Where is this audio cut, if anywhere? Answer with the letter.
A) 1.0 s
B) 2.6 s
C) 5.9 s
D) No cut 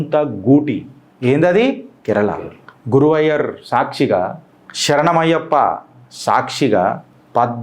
D